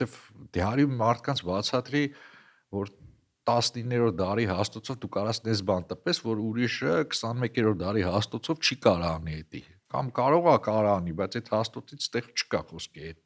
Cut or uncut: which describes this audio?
uncut